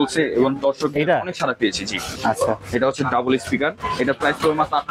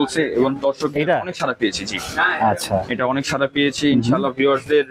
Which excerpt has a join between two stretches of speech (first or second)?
first